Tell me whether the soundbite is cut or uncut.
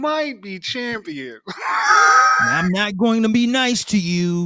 uncut